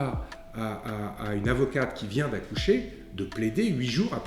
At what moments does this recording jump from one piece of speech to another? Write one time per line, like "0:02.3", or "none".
none